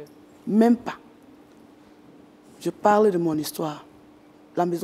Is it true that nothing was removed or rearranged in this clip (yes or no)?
yes